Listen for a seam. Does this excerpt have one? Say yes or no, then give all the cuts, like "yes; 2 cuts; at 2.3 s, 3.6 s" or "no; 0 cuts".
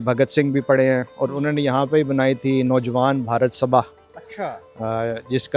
no; 0 cuts